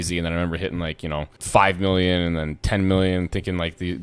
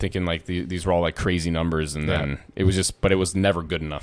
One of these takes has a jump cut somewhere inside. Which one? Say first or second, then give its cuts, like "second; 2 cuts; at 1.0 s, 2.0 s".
first; 1 cut; at 1.4 s